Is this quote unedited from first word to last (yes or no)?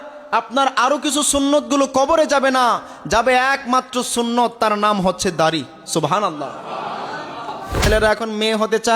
no